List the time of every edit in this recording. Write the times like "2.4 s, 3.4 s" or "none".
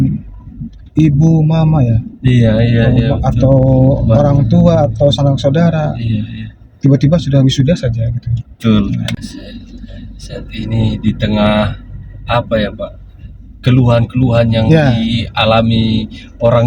9.2 s